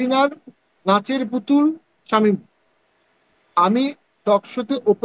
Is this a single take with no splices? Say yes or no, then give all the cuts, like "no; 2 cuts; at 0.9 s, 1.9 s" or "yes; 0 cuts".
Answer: yes; 0 cuts